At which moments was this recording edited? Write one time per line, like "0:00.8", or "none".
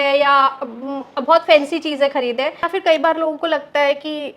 none